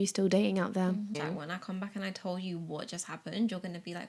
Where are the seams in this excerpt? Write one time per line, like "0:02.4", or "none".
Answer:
0:01.2

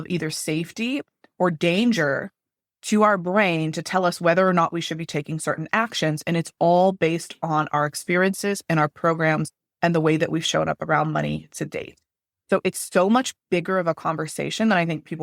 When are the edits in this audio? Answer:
none

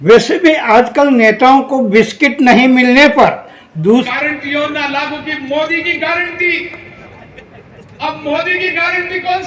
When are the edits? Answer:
0:04.1

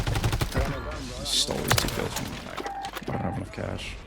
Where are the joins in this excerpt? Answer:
0:02.4

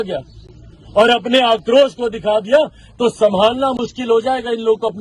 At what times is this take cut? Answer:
none

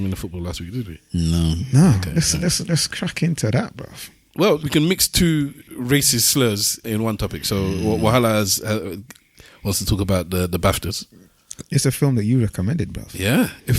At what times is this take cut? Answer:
0:04.6
0:05.6
0:06.8

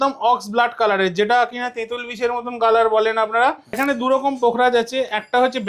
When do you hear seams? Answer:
0:03.7

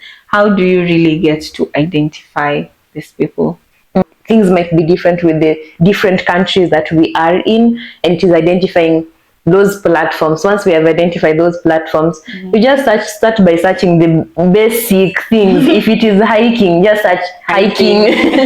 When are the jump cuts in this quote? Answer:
0:04.0

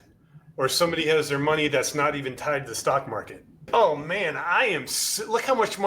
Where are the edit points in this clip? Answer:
0:03.6

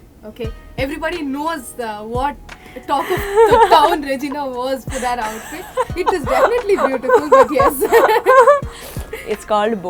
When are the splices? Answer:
none

